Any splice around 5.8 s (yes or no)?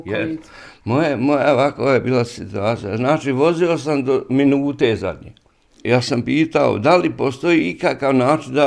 yes